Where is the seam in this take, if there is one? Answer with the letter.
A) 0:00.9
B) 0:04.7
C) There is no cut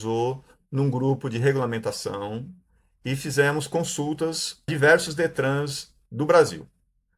B